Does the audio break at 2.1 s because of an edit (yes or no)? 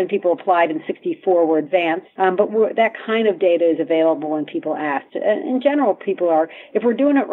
yes